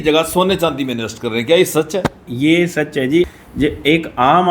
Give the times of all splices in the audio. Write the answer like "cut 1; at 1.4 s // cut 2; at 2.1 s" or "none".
cut 1; at 3.4 s